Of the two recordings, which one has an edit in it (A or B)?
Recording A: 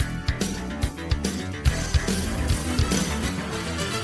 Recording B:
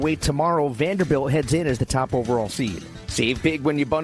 B